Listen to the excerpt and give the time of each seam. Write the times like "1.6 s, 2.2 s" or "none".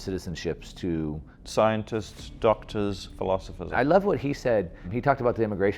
1.3 s, 3.7 s, 4.9 s